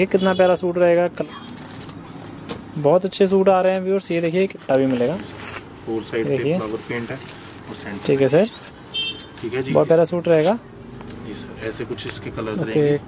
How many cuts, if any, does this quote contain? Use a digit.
2